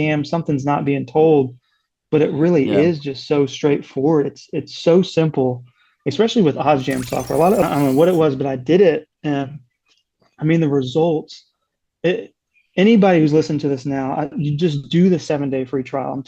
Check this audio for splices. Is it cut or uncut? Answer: cut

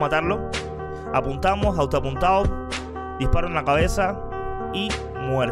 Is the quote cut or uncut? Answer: uncut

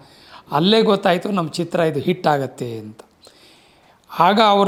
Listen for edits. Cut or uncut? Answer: uncut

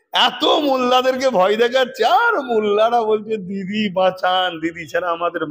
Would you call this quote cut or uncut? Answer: uncut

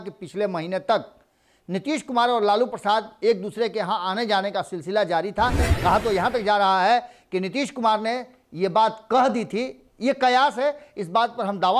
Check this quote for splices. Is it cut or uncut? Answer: cut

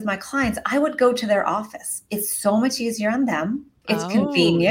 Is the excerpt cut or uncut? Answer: cut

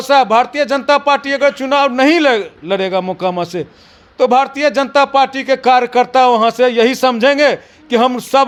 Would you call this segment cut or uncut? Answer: uncut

